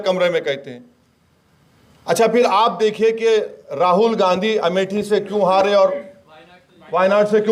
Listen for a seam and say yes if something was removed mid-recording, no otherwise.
no